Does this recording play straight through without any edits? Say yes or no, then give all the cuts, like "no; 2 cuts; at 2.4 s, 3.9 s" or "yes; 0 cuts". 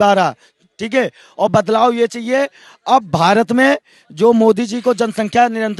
yes; 0 cuts